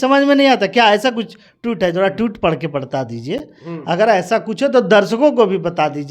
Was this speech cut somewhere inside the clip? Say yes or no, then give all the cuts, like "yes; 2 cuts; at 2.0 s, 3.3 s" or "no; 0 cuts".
no; 0 cuts